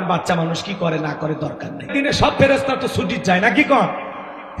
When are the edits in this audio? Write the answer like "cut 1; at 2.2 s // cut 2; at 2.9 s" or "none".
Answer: cut 1; at 1.9 s